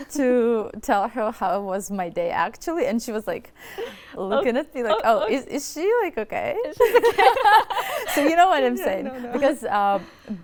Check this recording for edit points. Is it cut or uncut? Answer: uncut